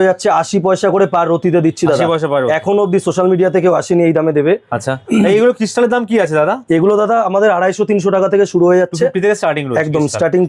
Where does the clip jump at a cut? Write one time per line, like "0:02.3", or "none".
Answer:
none